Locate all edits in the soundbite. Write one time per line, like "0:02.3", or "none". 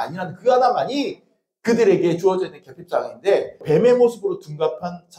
0:03.6